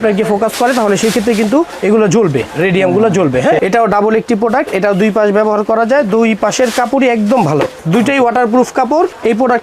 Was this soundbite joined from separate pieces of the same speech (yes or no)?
yes